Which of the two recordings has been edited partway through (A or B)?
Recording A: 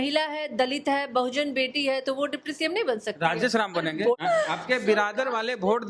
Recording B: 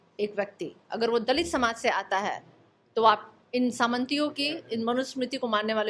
A